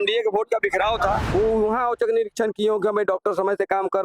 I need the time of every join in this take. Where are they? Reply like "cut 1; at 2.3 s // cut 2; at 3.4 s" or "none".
cut 1; at 1.2 s